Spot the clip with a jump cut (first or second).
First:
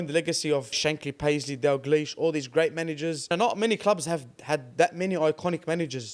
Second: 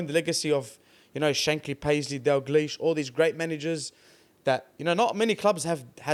first